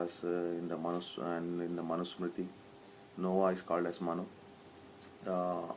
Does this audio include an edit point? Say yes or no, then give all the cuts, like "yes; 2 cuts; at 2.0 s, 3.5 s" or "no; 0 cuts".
yes; 1 cut; at 3.5 s